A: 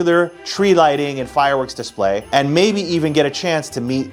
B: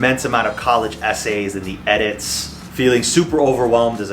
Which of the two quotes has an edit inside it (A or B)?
B